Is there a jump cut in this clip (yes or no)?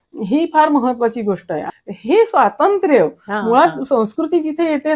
yes